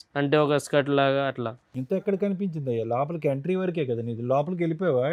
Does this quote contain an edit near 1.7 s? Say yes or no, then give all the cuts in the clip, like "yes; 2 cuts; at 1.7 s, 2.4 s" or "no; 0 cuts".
no; 0 cuts